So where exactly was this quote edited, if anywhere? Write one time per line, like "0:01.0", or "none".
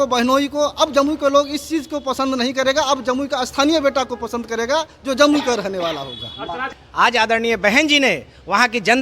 0:06.7

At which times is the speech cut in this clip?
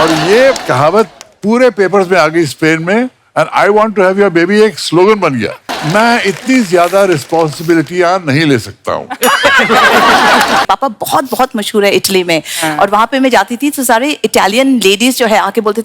0:05.7
0:10.6

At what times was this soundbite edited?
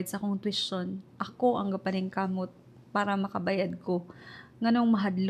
none

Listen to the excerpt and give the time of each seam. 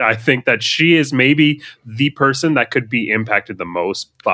none

